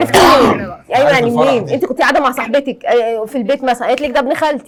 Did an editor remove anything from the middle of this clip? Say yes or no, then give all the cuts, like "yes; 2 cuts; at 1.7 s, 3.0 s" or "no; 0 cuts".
no; 0 cuts